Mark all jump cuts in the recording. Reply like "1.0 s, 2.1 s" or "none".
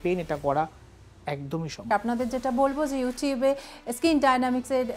1.8 s

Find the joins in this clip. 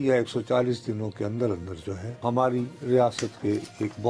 2.2 s

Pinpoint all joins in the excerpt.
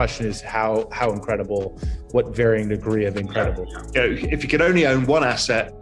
3.7 s

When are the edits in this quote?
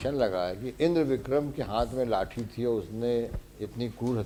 none

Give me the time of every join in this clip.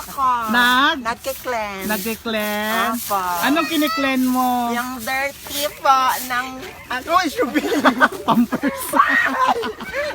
none

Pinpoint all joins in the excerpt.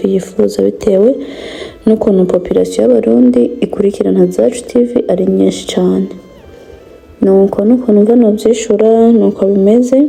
none

